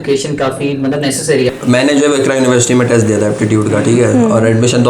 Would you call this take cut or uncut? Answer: cut